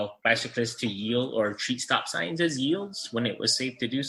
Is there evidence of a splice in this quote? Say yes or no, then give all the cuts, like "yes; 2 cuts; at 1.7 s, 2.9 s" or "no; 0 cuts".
no; 0 cuts